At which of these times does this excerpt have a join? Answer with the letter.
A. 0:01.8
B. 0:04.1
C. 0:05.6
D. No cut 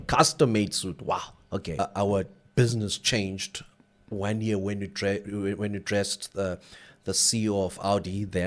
A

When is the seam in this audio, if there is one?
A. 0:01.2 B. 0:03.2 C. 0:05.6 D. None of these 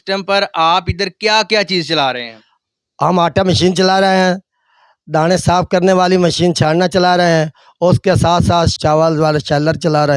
D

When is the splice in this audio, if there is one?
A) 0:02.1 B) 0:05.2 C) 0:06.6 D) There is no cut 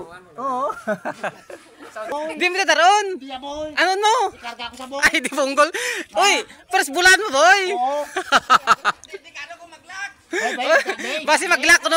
A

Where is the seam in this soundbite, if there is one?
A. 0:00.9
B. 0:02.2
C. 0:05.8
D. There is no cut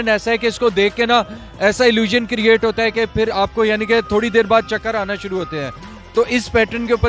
D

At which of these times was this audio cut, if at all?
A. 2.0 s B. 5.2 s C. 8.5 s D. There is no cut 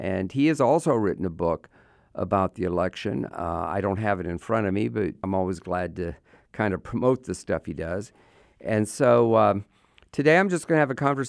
B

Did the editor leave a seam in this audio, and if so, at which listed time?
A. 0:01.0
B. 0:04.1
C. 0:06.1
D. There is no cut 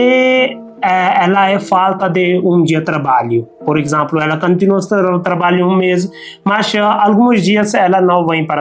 D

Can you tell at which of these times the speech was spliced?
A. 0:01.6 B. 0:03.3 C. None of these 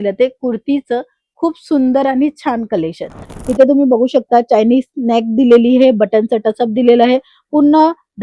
B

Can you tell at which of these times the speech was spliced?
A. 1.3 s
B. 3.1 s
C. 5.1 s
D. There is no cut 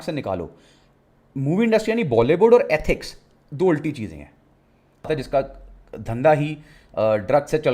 C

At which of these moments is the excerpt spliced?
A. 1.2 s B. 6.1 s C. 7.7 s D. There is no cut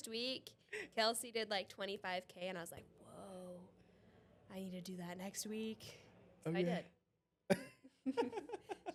D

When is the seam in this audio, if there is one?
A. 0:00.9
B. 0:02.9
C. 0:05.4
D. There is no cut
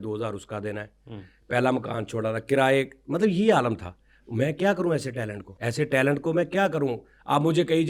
C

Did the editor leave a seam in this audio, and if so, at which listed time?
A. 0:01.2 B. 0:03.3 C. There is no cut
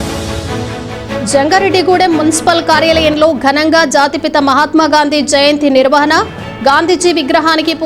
A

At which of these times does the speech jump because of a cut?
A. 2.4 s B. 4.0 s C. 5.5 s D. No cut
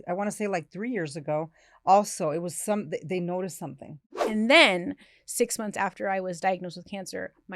B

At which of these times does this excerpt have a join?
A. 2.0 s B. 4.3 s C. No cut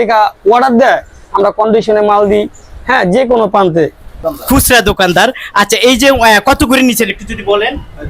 B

